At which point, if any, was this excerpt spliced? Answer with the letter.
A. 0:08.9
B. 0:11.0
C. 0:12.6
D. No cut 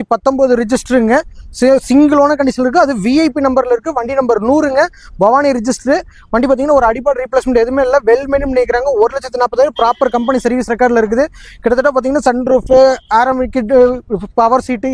D